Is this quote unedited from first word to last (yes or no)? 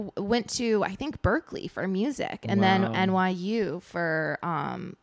yes